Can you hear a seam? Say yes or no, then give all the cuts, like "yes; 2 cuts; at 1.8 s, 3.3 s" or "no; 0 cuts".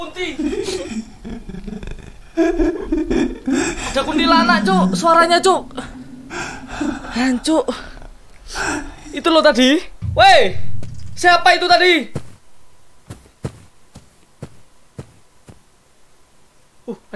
yes; 1 cut; at 10.0 s